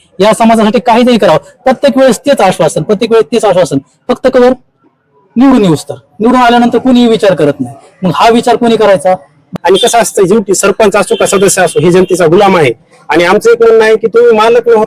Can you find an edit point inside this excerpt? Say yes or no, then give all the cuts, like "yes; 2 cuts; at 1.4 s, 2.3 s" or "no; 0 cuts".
yes; 1 cut; at 9.5 s